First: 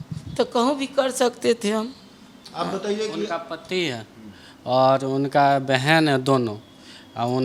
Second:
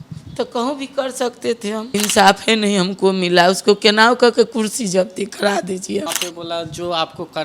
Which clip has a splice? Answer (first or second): second